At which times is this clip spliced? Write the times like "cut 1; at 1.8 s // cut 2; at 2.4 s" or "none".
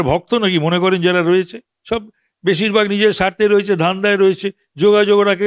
none